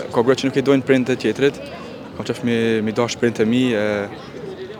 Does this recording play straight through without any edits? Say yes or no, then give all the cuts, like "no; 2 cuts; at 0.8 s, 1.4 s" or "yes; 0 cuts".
yes; 0 cuts